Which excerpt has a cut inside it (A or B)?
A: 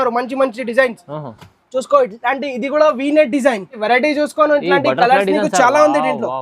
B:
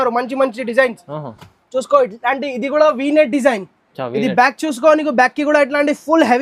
A